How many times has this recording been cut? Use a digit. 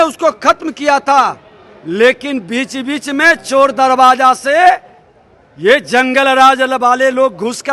0